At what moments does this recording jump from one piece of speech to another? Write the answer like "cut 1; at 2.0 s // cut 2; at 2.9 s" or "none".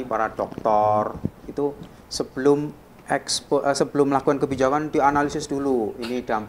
none